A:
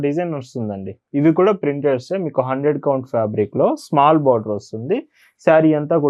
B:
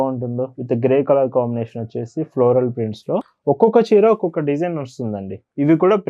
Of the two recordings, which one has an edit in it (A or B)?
B